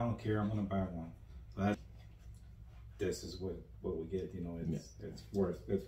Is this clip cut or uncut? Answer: cut